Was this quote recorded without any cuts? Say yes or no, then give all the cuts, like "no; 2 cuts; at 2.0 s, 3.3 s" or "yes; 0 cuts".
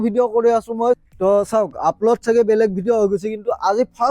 no; 1 cut; at 1.0 s